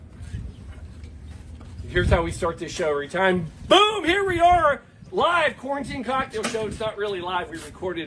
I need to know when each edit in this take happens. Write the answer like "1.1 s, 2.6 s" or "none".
none